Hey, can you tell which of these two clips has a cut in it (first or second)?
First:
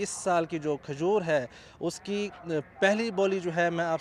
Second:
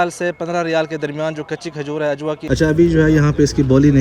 second